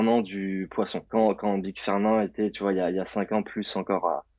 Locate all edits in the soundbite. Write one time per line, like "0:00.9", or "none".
0:01.0